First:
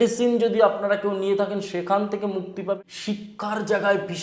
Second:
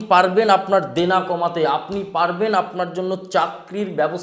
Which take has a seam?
first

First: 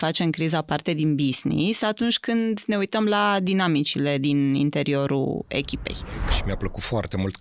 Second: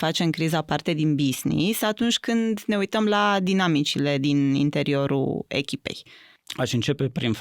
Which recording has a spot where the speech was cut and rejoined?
first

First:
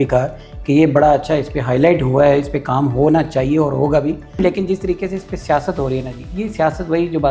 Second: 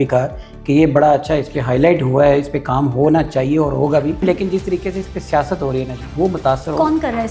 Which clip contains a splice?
second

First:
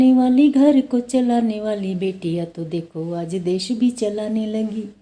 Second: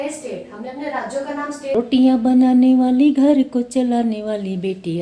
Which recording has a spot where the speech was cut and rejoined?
second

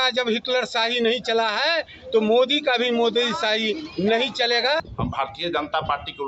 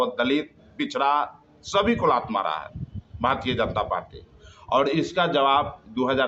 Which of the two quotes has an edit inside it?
first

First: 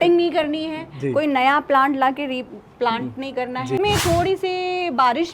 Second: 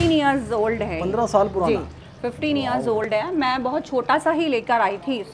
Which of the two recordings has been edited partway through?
first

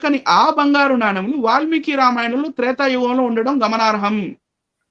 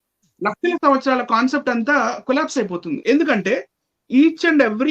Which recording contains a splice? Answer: second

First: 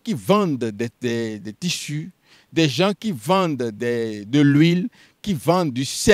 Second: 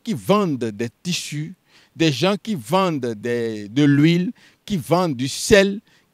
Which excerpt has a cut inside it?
second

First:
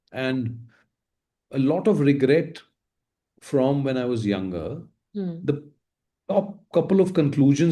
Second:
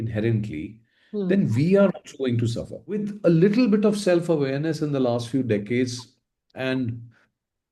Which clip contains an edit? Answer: second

